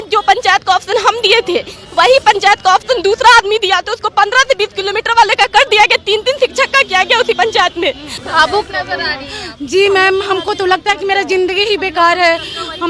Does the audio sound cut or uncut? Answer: cut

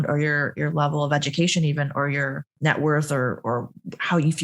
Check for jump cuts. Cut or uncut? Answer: cut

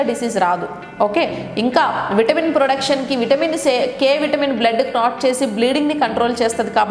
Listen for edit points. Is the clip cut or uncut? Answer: uncut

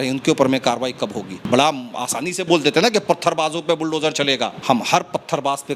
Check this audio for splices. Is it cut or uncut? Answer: cut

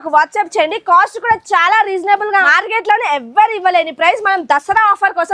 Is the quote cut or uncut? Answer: cut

